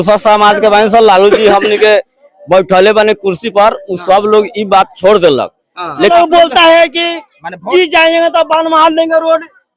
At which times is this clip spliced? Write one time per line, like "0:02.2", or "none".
0:06.1